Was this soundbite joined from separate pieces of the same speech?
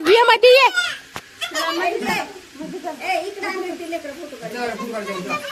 no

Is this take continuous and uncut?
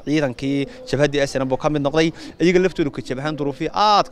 no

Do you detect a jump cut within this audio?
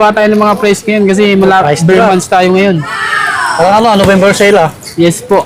no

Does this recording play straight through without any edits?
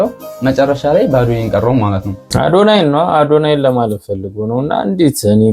no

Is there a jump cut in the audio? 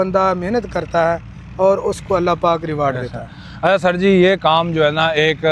no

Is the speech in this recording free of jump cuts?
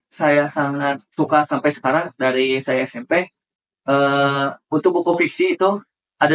yes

